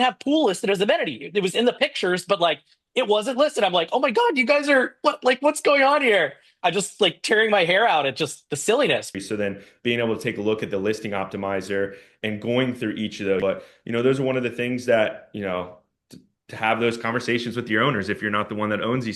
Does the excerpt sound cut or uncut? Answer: cut